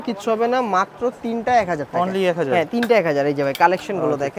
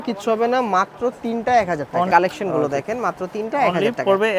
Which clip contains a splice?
second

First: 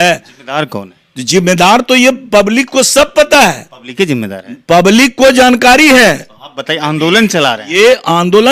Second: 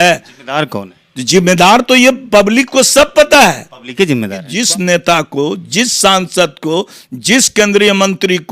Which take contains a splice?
second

